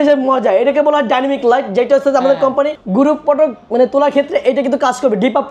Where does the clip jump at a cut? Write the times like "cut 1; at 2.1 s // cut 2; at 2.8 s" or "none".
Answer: cut 1; at 2.8 s